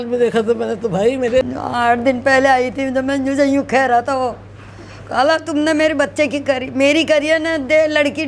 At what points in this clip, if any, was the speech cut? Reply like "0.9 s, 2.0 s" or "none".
1.4 s